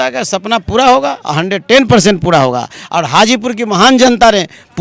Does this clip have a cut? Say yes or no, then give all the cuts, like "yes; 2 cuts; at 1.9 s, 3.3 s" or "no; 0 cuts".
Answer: no; 0 cuts